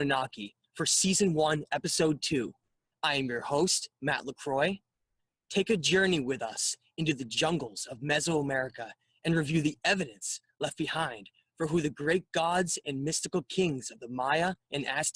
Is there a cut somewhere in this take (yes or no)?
yes